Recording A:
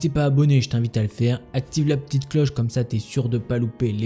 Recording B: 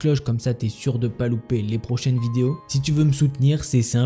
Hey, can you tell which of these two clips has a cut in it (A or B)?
B